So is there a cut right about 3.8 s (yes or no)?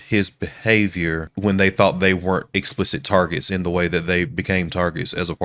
no